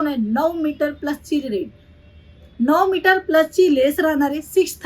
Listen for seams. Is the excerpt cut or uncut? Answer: uncut